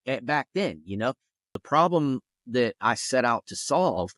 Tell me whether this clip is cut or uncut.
cut